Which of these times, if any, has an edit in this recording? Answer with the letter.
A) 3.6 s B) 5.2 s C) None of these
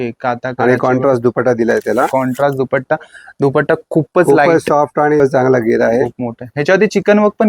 B